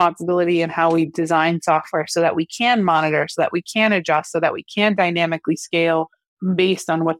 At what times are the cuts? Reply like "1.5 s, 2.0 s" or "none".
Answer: none